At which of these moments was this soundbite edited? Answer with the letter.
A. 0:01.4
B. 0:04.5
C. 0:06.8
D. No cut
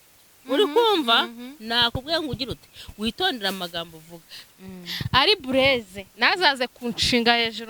B